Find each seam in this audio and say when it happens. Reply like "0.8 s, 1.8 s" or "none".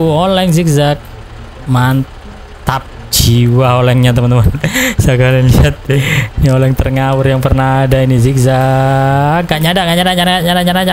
none